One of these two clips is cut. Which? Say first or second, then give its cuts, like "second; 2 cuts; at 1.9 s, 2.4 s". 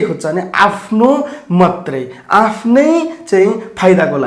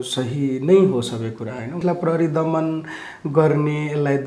second; 1 cut; at 1.8 s